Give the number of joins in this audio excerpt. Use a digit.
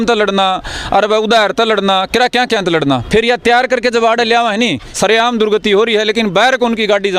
1